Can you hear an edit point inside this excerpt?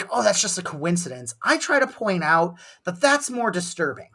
no; 0 cuts

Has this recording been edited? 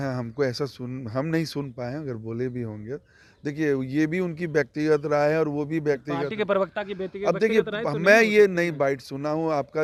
no; 0 cuts

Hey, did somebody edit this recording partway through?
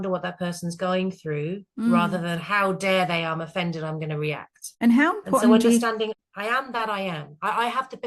yes; 2 cuts; at 4.6 s, 6.2 s

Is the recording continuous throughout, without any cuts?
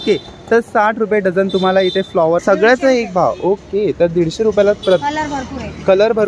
no; 1 cut; at 2.4 s

